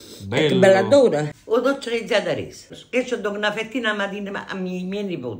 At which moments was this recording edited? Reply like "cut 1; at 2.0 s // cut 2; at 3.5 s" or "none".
cut 1; at 1.3 s // cut 2; at 2.7 s